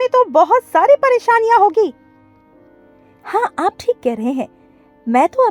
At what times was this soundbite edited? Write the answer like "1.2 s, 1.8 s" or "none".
none